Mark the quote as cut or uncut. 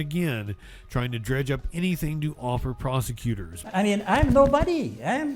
cut